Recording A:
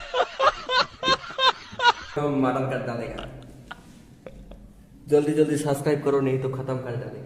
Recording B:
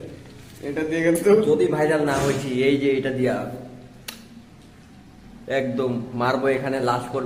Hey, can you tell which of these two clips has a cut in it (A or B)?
A